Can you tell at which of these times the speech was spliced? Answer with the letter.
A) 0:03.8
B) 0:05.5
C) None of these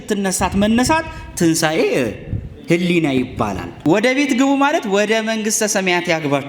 A